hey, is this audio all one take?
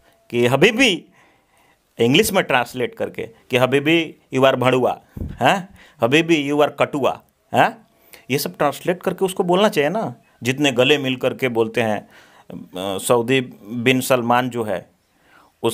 yes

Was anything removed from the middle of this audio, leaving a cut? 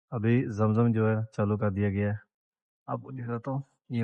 no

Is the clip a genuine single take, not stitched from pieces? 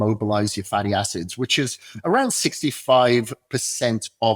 yes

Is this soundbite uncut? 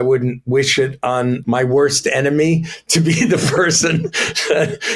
no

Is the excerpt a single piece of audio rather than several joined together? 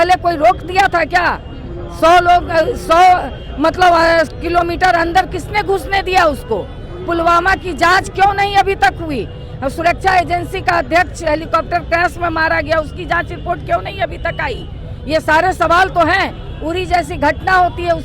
yes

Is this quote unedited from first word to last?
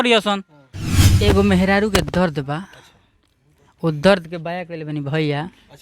no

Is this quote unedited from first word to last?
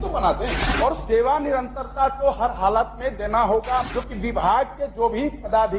no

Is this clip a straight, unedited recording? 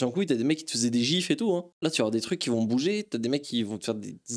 yes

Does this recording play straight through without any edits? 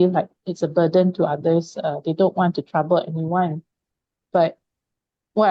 yes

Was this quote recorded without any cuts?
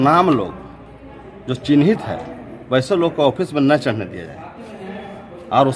yes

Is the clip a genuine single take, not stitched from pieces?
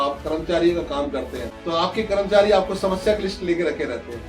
no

